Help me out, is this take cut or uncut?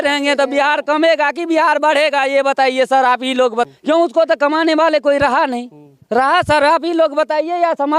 cut